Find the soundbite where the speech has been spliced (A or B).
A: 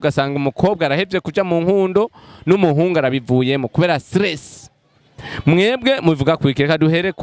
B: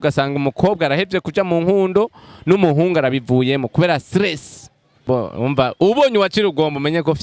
B